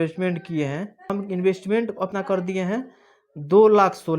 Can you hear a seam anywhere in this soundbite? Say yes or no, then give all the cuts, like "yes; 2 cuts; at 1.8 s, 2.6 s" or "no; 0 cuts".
yes; 2 cuts; at 1.0 s, 2.1 s